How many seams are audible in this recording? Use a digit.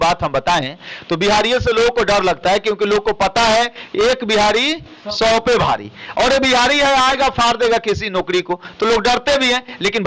0